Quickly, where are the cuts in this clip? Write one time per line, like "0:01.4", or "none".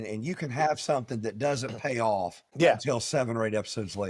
0:02.5